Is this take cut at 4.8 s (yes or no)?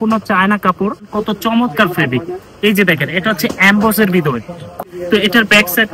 yes